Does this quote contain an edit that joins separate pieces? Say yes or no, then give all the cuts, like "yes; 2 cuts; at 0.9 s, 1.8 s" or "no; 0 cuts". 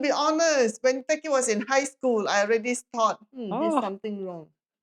no; 0 cuts